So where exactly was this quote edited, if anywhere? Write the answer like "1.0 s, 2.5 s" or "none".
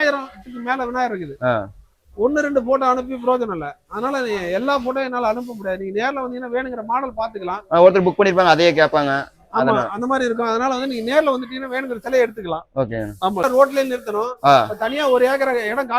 13.4 s